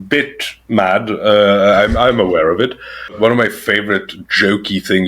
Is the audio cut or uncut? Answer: cut